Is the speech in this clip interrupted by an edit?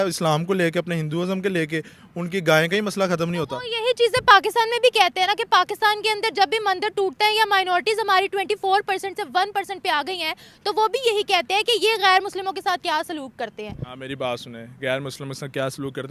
no; 0 cuts

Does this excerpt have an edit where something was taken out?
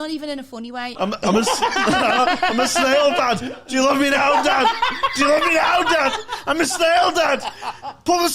yes; 1 cut; at 0.9 s

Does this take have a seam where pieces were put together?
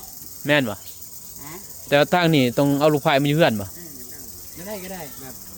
no; 0 cuts

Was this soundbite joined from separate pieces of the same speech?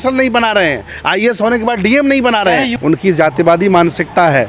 yes; 1 cut; at 2.7 s

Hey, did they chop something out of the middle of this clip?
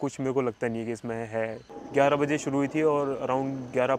yes; 1 cut; at 1.7 s

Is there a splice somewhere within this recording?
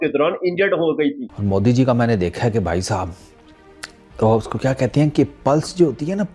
yes; 1 cut; at 1.3 s

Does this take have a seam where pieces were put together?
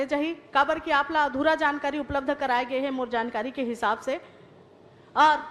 no; 0 cuts

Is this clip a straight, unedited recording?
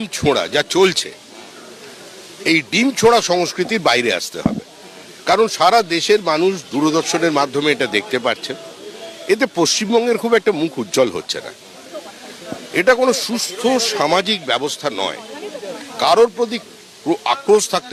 yes; 0 cuts

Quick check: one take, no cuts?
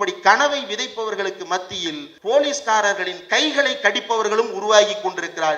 no; 1 cut; at 2.1 s

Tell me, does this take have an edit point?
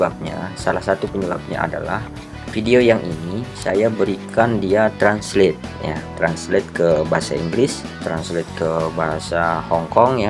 yes; 1 cut; at 7.9 s

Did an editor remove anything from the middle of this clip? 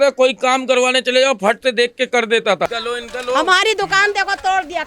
yes; 1 cut; at 2.7 s

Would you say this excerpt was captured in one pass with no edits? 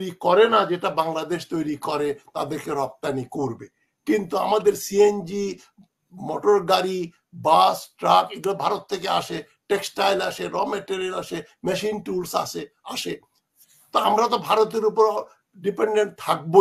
yes; 0 cuts

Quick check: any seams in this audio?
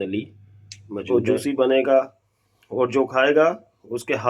yes; 1 cut; at 1.0 s

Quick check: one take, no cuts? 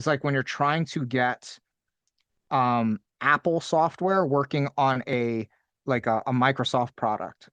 yes; 0 cuts

